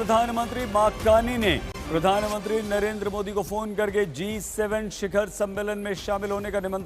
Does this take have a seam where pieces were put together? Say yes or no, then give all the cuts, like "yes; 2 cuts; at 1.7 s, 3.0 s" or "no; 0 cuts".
no; 0 cuts